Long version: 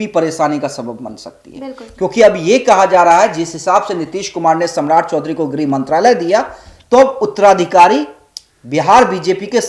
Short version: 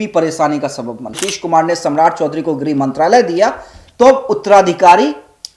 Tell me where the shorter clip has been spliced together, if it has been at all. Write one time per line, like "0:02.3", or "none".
0:01.2

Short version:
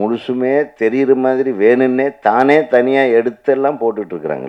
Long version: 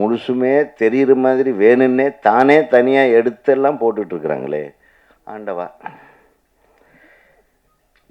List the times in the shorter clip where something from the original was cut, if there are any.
none

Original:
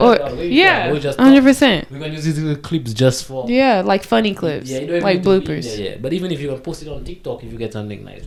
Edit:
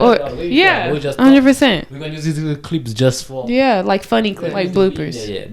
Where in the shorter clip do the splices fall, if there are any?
0:04.4

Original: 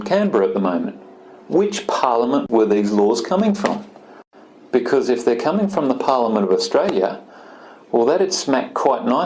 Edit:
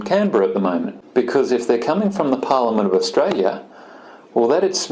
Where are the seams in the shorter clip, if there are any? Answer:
0:01.0

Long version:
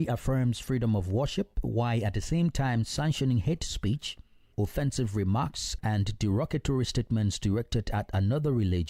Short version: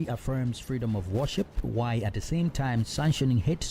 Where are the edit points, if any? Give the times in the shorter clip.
none

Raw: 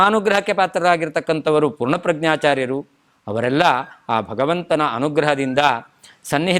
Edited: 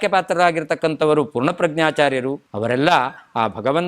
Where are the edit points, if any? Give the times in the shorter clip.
0:02.5

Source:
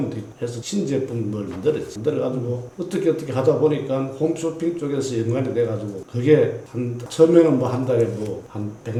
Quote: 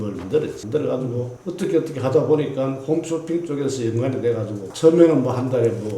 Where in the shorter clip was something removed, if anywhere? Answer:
0:04.6

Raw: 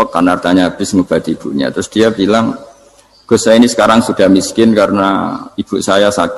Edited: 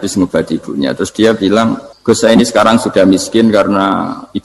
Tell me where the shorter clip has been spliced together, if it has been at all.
0:01.9

